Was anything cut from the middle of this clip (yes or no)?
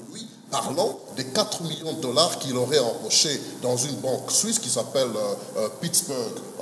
no